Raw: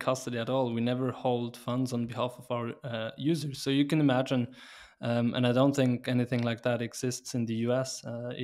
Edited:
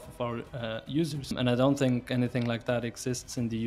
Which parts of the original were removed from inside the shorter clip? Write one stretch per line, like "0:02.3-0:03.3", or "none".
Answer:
0:03.6-0:05.3